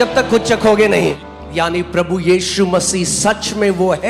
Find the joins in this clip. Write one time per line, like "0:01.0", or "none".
0:01.2